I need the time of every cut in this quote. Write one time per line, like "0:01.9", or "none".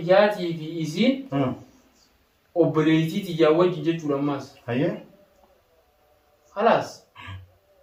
none